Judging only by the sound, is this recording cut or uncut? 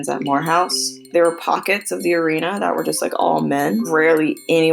cut